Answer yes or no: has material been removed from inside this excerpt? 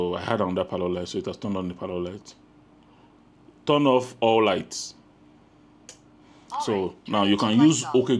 no